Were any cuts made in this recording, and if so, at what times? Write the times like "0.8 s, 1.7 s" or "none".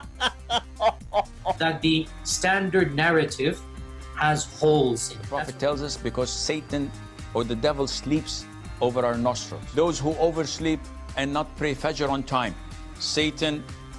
1.0 s